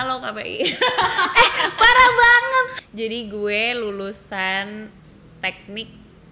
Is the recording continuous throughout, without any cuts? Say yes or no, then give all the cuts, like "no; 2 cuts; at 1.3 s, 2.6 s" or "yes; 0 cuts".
no; 1 cut; at 2.8 s